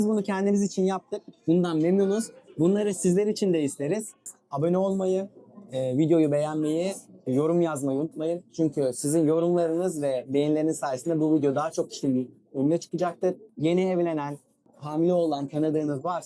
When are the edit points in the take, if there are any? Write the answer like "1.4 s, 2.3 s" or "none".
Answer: 4.2 s, 14.7 s

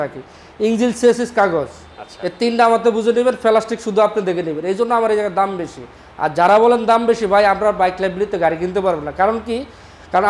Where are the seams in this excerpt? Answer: none

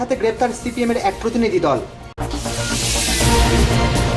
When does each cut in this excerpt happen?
none

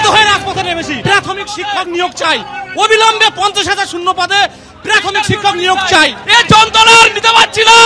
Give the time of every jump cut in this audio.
1.0 s, 6.2 s

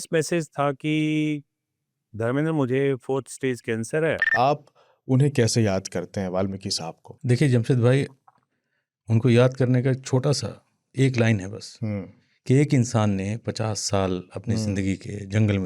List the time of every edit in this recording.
4.3 s, 7.1 s

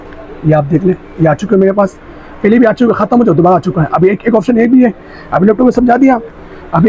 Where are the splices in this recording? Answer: none

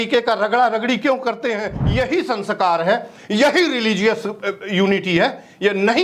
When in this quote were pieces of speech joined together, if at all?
1.8 s

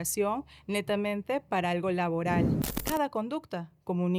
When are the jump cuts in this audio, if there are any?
2.7 s

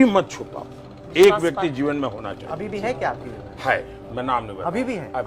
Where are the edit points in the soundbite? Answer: none

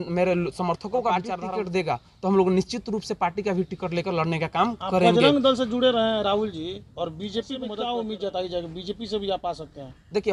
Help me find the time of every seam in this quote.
1.3 s, 7.7 s

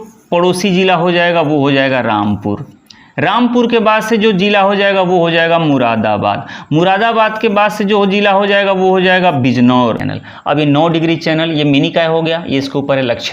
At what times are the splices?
10.0 s

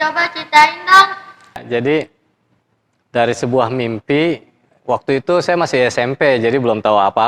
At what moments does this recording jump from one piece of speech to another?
1.6 s

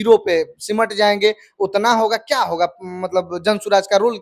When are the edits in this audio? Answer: none

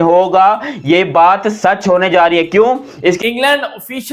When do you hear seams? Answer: 3.2 s

